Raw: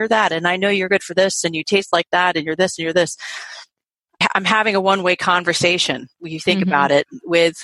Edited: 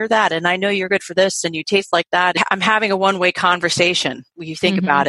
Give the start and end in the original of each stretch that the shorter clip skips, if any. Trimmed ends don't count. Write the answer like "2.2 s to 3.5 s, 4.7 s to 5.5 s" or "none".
2.4 s to 4.2 s